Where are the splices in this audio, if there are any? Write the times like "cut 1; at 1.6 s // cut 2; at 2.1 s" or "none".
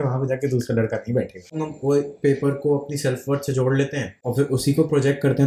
cut 1; at 1.5 s // cut 2; at 4.2 s

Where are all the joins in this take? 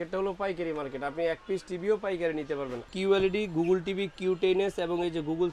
cut 1; at 2.9 s

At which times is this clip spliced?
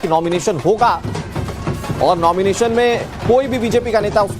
cut 1; at 2.2 s

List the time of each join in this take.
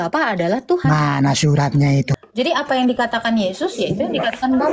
cut 1; at 2.1 s

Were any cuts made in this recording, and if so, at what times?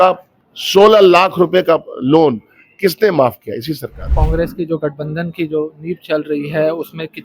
cut 1; at 4.2 s

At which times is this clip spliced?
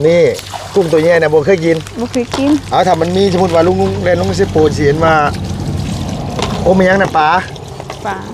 none

